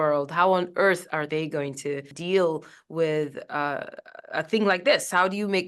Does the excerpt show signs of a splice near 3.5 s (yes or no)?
no